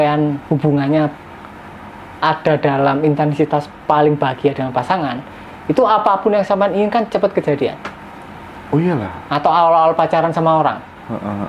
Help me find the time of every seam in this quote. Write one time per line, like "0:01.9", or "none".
none

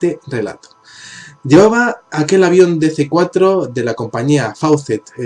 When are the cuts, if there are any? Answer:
none

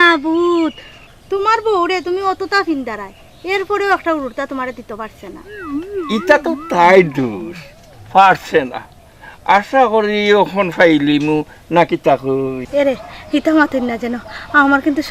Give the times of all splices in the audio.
0:12.6

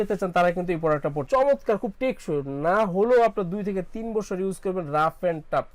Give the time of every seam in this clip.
0:01.2

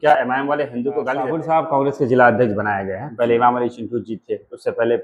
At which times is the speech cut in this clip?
0:01.4

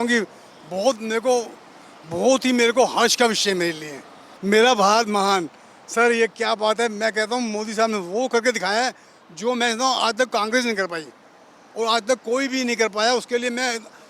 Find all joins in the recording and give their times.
0:04.3

